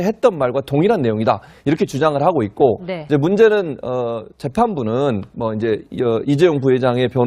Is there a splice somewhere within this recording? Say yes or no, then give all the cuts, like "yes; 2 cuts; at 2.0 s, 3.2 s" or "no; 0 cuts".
yes; 1 cut; at 2.0 s